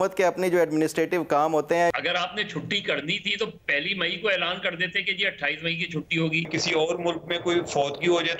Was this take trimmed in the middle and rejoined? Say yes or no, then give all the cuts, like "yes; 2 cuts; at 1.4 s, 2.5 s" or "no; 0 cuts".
yes; 2 cuts; at 1.9 s, 6.5 s